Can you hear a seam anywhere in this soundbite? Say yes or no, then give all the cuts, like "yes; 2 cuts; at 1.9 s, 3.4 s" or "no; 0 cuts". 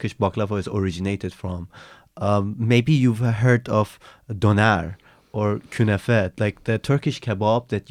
no; 0 cuts